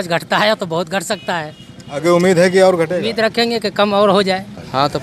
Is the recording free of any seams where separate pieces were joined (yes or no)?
yes